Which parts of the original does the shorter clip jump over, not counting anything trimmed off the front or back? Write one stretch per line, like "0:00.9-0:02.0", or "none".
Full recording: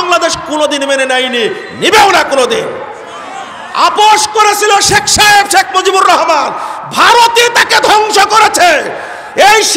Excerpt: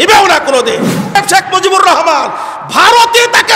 0:03.0-0:05.4